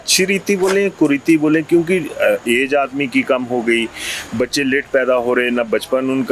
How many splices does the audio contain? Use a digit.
0